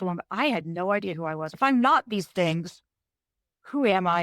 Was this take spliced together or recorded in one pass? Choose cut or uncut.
cut